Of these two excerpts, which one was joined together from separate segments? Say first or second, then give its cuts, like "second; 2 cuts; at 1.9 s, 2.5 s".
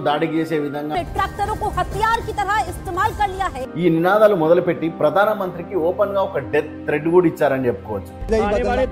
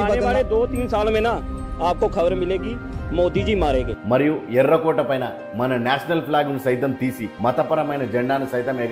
first; 2 cuts; at 0.9 s, 3.6 s